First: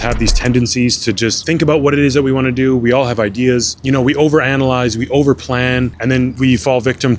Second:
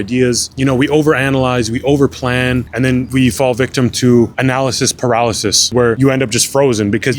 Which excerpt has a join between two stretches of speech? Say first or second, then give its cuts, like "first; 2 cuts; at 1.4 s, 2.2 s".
second; 1 cut; at 5.7 s